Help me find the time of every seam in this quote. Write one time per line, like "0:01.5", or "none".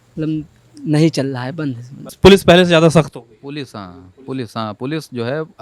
0:02.1